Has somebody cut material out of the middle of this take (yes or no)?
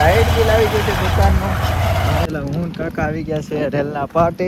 yes